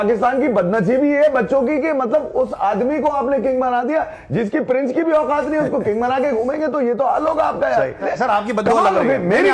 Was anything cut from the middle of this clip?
yes; 1 cut; at 7.9 s

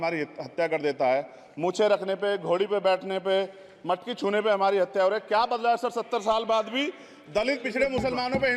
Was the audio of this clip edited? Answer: no; 0 cuts

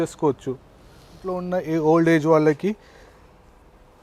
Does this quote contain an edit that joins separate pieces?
yes; 1 cut; at 1.4 s

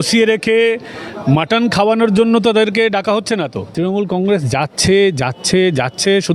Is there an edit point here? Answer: yes; 1 cut; at 3.6 s

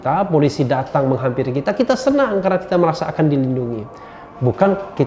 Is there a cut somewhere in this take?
no; 0 cuts

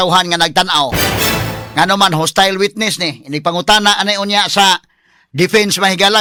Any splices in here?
no; 0 cuts

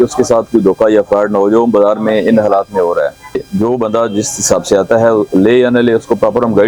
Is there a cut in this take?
yes; 1 cut; at 3.4 s

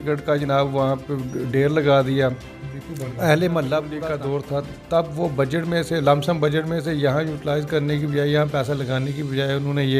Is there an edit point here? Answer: yes; 1 cut; at 4.0 s

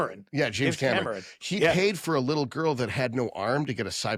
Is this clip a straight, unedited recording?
yes; 0 cuts

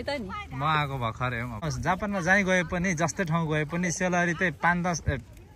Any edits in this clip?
yes; 1 cut; at 1.7 s

